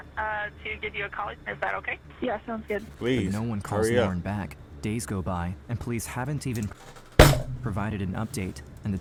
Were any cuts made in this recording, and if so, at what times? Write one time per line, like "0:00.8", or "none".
none